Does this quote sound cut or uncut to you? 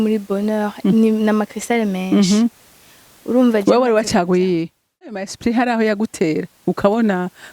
cut